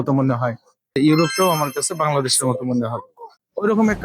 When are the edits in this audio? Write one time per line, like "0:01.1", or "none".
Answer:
0:00.9